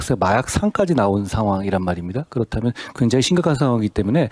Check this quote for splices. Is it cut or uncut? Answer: uncut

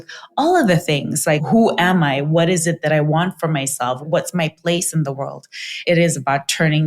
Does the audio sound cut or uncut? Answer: cut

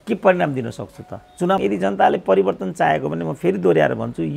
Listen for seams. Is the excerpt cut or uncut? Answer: cut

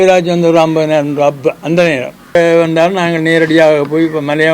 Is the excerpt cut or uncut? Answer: cut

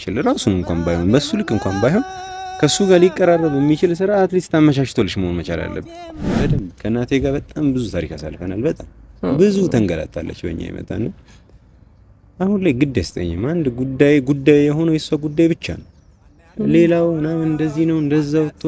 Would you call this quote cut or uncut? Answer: cut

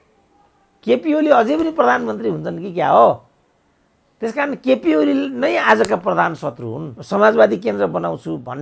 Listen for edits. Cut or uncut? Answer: cut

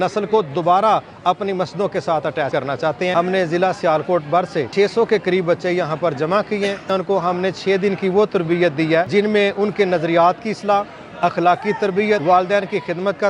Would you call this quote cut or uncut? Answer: cut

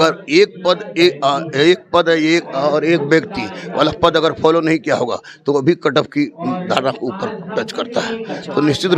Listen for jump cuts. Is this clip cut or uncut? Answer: uncut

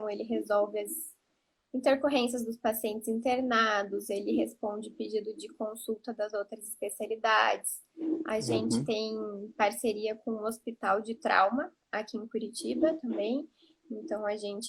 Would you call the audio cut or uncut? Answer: uncut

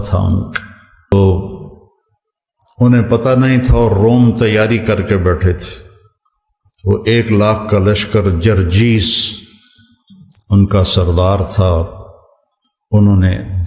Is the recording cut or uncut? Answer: cut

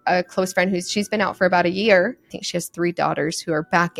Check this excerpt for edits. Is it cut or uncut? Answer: cut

